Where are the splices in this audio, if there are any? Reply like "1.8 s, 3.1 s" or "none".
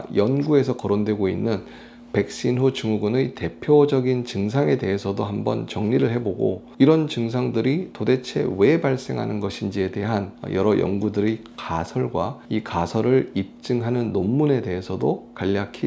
10.4 s, 12.4 s